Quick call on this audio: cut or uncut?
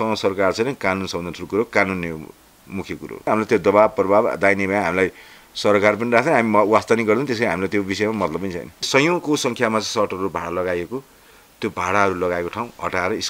cut